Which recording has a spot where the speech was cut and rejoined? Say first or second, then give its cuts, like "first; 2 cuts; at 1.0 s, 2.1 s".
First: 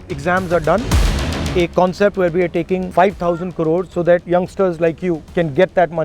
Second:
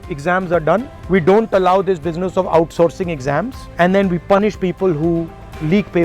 first; 4 cuts; at 1.3 s, 2.9 s, 4.0 s, 5.2 s